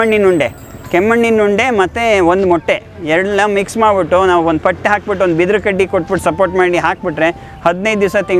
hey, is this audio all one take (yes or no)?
yes